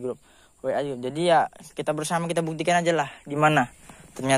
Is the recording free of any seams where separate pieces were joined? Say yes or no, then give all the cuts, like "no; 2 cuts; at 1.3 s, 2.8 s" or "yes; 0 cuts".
yes; 0 cuts